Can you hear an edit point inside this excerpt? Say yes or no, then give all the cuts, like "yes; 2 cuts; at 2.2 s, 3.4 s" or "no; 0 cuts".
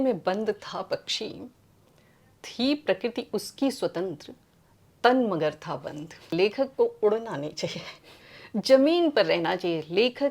yes; 1 cut; at 6.3 s